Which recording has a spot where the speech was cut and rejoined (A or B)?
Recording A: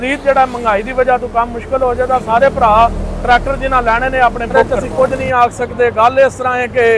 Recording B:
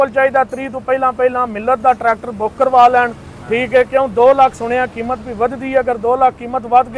A